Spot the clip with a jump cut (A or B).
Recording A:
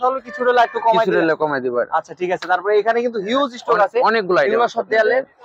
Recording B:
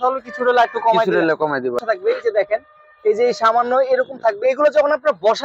B